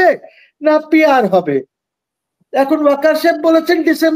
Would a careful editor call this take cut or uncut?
uncut